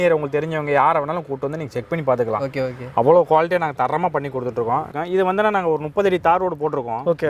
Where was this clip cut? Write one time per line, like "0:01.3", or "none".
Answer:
0:04.9